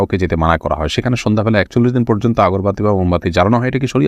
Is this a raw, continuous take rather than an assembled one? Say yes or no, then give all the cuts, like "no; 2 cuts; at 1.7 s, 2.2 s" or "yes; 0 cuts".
yes; 0 cuts